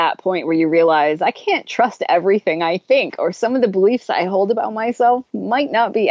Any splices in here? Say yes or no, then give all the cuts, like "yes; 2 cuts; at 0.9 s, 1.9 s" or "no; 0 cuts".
no; 0 cuts